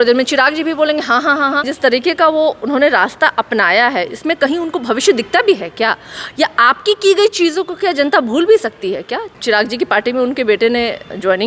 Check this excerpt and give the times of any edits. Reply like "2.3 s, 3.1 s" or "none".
1.7 s, 9.3 s